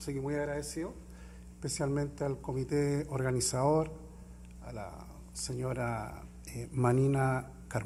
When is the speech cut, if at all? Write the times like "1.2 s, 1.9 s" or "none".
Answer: none